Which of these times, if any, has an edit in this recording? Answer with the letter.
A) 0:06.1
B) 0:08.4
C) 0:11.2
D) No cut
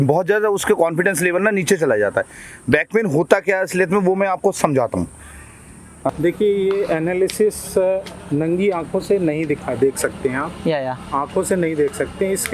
A